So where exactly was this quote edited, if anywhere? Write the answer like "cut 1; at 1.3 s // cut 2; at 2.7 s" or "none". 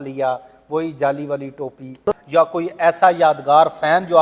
cut 1; at 2.1 s